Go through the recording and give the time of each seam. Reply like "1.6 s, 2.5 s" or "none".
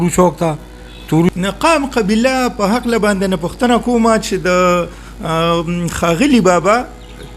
1.3 s